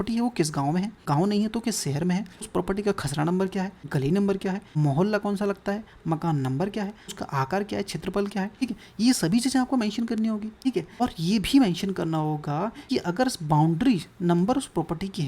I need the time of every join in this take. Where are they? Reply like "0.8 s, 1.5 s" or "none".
1.0 s, 2.5 s, 3.8 s, 4.7 s, 7.2 s, 8.6 s, 11.0 s, 12.8 s

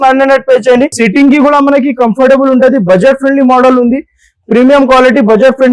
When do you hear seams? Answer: 0.9 s

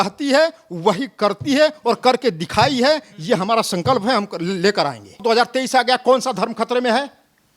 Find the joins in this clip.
5.2 s

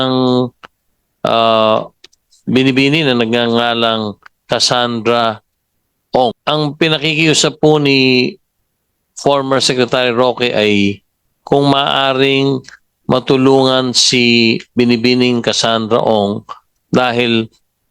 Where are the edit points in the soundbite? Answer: 6.4 s

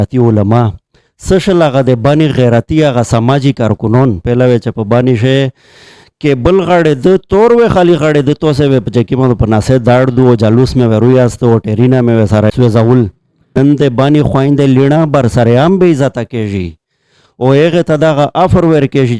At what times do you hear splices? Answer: 4.2 s, 12.5 s, 13.6 s

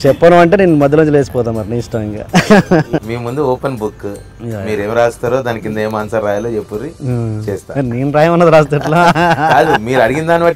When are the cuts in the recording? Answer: 2.9 s

